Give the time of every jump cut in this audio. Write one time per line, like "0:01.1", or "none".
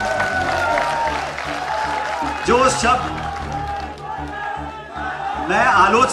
none